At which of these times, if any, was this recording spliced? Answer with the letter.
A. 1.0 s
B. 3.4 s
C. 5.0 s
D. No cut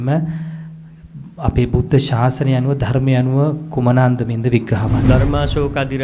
C